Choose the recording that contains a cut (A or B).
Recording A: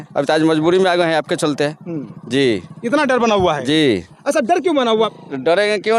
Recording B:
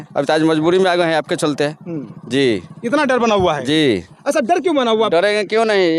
B